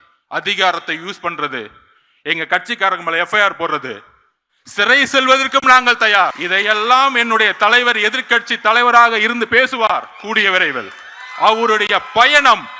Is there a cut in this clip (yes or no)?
yes